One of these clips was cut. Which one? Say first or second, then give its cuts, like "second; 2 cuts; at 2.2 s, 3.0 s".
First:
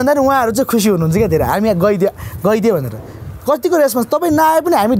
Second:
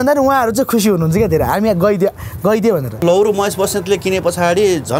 second; 1 cut; at 3.0 s